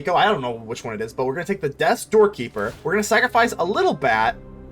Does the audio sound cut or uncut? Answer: cut